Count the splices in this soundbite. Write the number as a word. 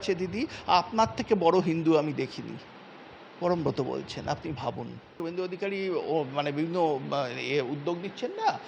one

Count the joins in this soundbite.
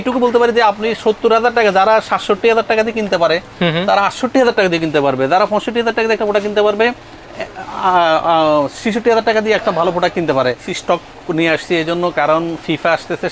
one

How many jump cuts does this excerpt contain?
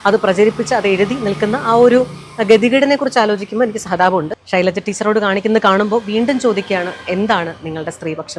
one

